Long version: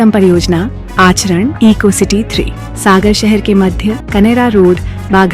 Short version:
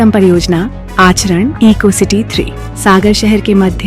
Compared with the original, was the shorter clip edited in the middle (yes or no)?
no